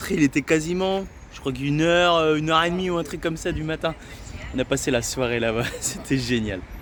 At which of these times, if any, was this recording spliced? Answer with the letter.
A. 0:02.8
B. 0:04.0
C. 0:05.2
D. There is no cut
D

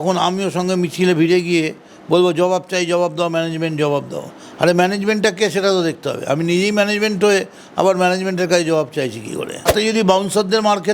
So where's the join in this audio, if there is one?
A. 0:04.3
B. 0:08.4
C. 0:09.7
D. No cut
C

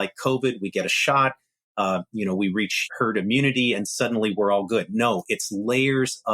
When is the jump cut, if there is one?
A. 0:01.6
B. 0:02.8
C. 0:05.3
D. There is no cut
B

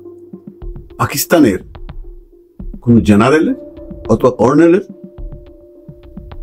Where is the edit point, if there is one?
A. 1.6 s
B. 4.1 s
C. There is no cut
C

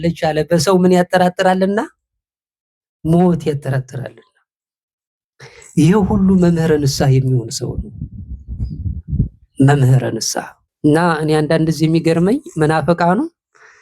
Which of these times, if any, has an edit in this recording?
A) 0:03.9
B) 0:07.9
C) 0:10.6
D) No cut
C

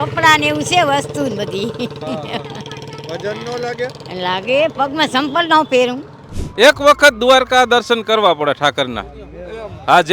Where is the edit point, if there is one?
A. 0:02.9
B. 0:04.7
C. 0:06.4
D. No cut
C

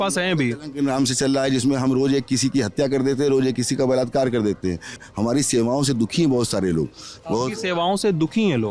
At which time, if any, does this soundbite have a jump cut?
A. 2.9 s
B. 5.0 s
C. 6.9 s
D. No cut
B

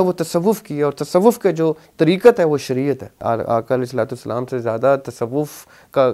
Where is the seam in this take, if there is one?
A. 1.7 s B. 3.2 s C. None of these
B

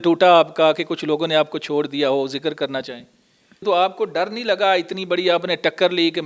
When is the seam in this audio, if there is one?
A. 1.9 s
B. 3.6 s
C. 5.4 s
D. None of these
B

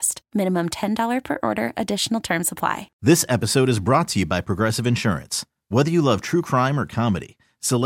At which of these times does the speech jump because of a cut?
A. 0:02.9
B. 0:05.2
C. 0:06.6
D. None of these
A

